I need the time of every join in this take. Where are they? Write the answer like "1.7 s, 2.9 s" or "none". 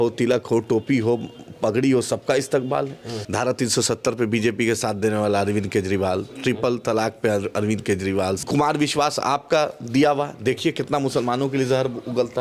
3.2 s, 8.4 s